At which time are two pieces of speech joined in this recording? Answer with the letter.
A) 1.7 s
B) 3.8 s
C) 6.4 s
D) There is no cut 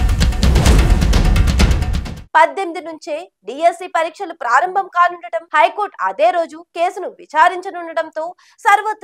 A